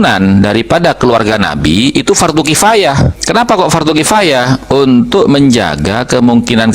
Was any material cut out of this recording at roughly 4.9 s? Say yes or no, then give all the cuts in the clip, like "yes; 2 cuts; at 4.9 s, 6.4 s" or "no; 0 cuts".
no; 1 cut; at 3.2 s